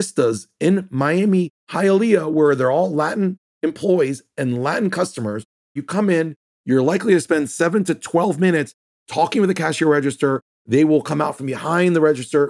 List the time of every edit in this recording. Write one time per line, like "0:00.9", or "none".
0:05.8